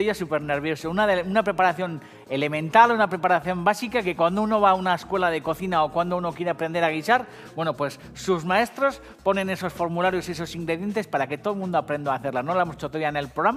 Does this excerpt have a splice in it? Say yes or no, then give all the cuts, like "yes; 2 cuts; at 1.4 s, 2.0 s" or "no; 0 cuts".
yes; 1 cut; at 6.1 s